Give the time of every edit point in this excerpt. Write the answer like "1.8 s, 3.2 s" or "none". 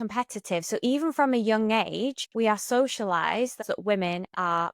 2.2 s, 3.6 s